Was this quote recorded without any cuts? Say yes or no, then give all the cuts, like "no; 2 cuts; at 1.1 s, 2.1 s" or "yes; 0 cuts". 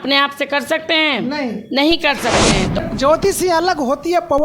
no; 1 cut; at 2.8 s